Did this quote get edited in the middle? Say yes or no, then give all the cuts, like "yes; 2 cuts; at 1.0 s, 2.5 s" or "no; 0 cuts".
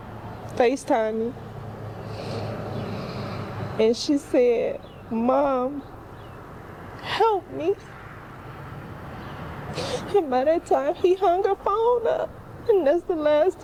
no; 0 cuts